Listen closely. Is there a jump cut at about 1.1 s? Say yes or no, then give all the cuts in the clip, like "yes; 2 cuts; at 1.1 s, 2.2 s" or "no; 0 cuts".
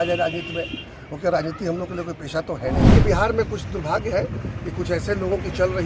no; 1 cut; at 2.9 s